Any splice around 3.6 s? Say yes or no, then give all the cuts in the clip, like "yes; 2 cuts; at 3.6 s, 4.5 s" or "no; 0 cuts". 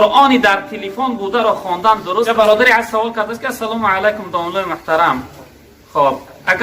no; 1 cut; at 2.3 s